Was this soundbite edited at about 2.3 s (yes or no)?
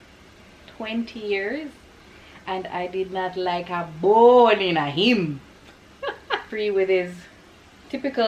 no